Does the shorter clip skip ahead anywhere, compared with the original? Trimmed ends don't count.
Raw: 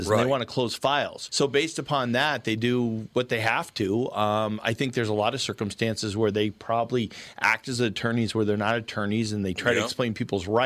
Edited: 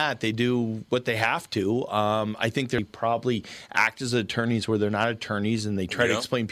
yes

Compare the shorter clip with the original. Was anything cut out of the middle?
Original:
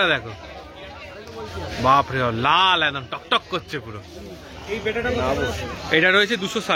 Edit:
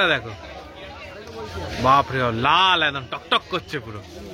no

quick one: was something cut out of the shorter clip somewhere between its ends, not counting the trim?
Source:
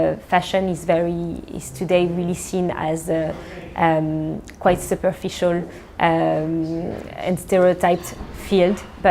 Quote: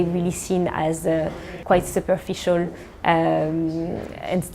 yes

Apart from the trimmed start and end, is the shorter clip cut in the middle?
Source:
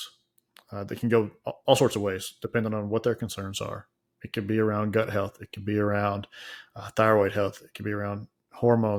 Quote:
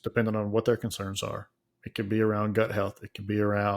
no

